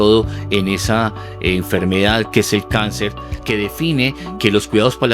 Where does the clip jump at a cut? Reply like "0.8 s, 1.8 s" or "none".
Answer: 3.3 s